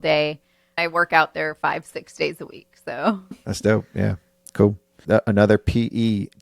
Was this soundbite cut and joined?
yes; 3 cuts; at 0.8 s, 3.3 s, 4.9 s

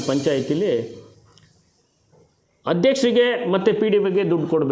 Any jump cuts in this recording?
no; 0 cuts

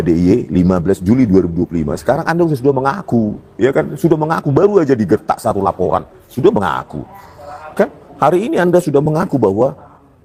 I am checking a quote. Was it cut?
no; 0 cuts

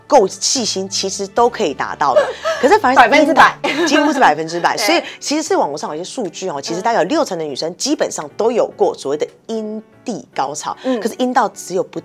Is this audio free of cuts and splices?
yes; 0 cuts

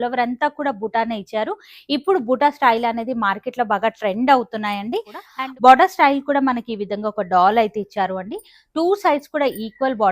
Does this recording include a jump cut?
yes; 1 cut; at 5.2 s

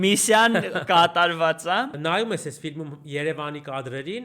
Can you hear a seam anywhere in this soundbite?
yes; 1 cut; at 2.0 s

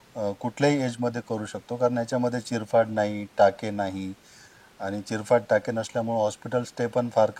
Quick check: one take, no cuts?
yes; 0 cuts

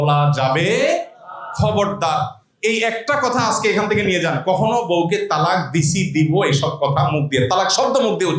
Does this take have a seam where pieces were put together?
no; 0 cuts

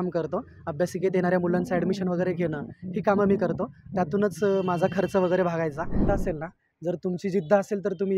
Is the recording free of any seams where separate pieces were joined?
no; 1 cut; at 6.1 s

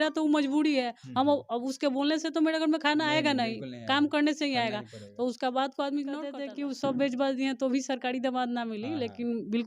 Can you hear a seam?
yes; 1 cut; at 6.4 s

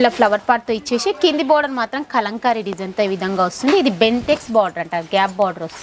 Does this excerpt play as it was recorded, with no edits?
yes; 0 cuts

